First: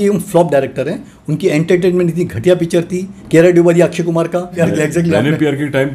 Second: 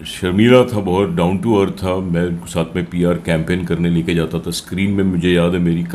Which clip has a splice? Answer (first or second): first